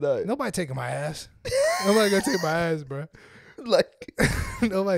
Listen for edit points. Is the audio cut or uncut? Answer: uncut